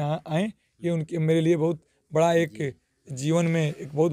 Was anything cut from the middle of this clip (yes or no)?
no